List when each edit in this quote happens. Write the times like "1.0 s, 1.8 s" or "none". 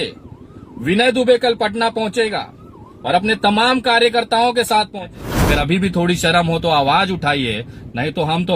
5.0 s